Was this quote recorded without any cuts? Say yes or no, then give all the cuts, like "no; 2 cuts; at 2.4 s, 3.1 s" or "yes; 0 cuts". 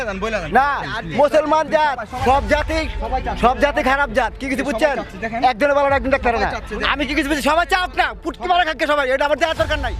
yes; 0 cuts